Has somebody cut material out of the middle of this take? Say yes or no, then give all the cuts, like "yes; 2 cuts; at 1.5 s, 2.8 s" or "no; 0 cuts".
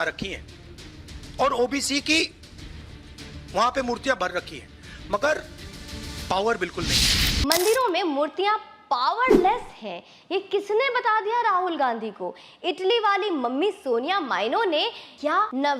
yes; 1 cut; at 7.4 s